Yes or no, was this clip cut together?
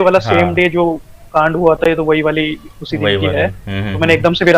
no